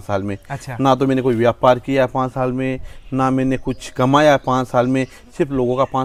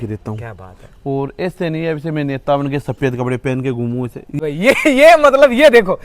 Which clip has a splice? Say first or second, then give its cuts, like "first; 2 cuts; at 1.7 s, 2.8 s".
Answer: second; 1 cut; at 4.4 s